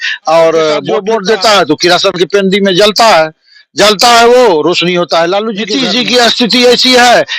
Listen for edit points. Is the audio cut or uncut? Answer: cut